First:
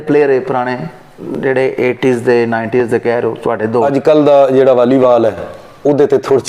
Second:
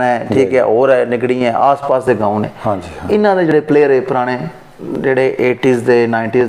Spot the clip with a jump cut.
first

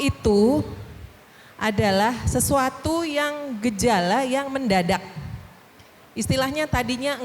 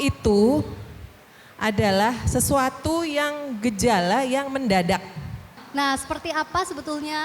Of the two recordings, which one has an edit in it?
second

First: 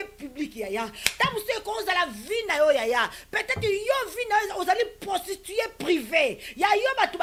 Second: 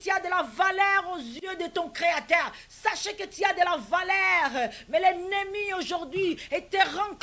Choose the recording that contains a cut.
second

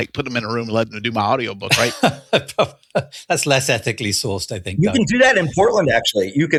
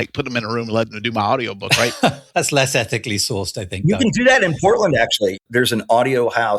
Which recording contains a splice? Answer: second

